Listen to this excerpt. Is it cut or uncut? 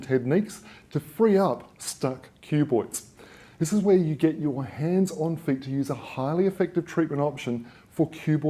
cut